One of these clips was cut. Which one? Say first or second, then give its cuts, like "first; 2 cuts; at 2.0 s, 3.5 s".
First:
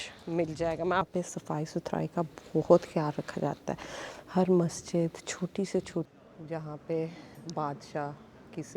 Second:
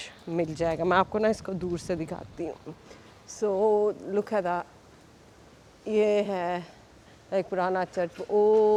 first; 2 cuts; at 1.1 s, 6.1 s